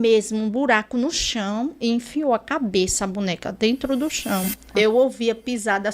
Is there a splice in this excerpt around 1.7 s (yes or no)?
no